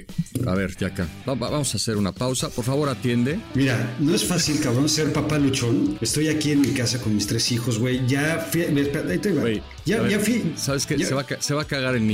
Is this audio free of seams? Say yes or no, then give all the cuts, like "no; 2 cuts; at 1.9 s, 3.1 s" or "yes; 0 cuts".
no; 3 cuts; at 3.5 s, 6.0 s, 11.1 s